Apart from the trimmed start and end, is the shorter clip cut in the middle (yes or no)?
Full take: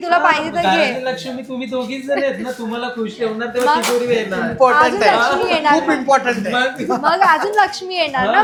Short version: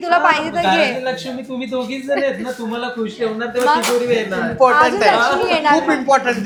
no